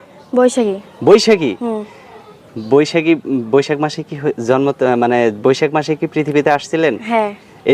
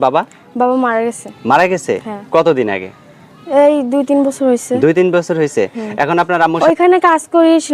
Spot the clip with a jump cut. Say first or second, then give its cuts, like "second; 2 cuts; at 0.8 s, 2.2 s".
second; 1 cut; at 6.6 s